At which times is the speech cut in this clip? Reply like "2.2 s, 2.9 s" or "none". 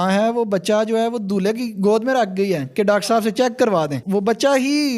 4.0 s